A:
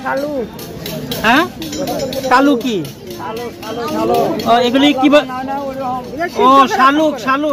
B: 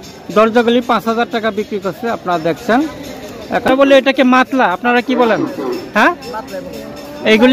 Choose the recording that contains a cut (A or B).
B